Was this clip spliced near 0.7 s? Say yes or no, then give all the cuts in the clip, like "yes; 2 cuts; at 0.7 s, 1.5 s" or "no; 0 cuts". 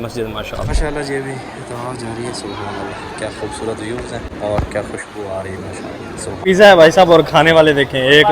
yes; 3 cuts; at 0.7 s, 4.3 s, 6.3 s